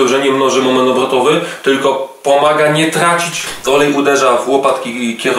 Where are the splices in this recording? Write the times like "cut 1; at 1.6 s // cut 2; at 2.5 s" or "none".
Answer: cut 1; at 3.5 s